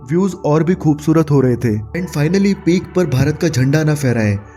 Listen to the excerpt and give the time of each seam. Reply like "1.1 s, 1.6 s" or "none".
1.9 s